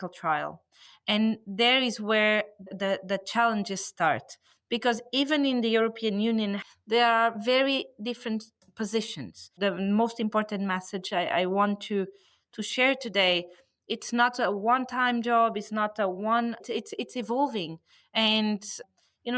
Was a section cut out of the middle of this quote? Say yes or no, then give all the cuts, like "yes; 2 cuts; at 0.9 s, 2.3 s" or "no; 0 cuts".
yes; 2 cuts; at 6.6 s, 9.5 s